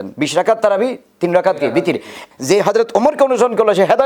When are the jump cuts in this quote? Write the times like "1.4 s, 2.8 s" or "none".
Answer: 2.2 s